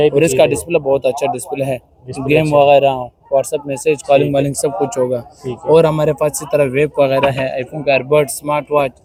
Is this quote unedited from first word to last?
yes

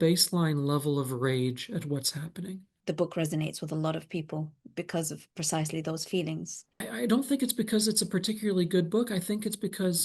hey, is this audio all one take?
no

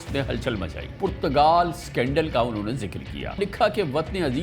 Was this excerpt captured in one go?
no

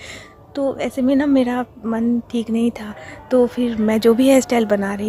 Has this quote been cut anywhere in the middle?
no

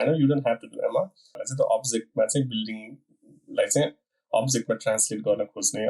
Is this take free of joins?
no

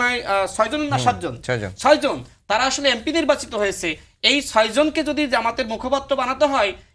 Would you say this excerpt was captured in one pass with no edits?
yes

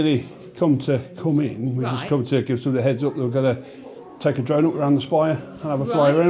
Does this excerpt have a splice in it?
no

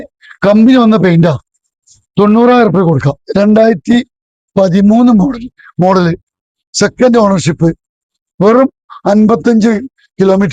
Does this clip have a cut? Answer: yes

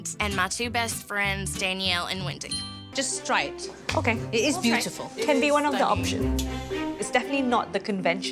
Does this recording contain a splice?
yes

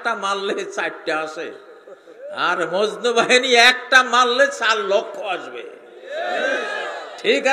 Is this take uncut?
yes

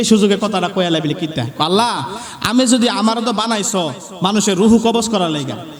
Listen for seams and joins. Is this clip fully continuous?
yes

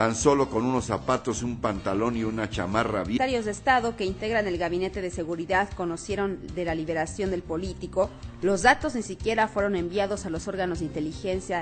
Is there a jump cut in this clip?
no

